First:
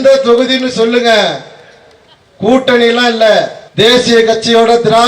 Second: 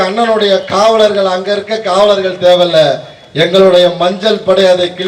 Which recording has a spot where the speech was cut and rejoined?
first; 1 cut; at 3.6 s

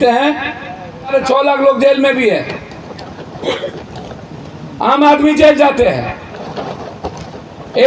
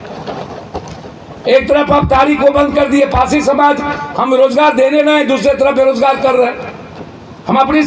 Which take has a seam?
first; 1 cut; at 1.1 s

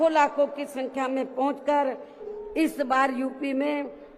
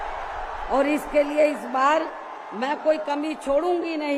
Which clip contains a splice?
first; 1 cut; at 2.2 s

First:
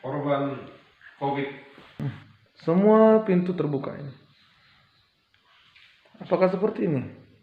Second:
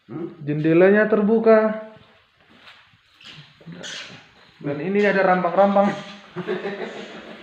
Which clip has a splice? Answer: first; 1 cut; at 1.8 s

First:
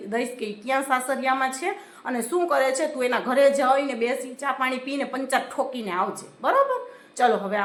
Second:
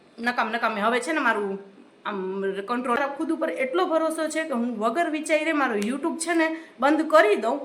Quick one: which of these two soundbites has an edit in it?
second; 1 cut; at 3.0 s

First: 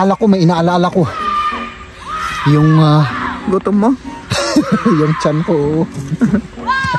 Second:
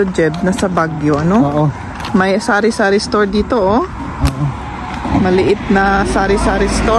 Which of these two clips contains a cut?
second; 1 cut; at 5.1 s

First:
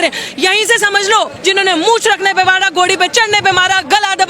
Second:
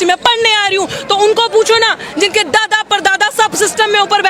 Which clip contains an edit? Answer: first; 1 cut; at 1.4 s

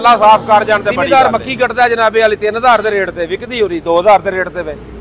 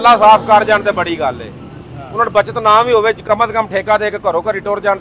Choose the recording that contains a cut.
first; 1 cut; at 1.0 s

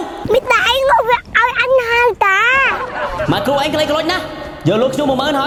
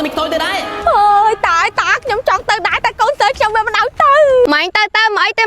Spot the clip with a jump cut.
second; 1 cut; at 4.5 s

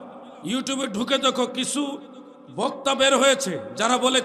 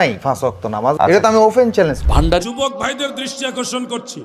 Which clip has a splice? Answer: second; 1 cut; at 2.4 s

